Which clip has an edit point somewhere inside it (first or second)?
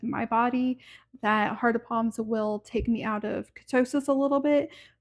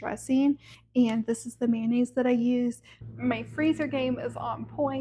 second